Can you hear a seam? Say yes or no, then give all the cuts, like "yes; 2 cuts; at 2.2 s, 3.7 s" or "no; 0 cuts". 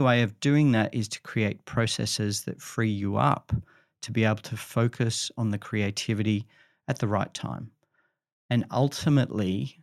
no; 0 cuts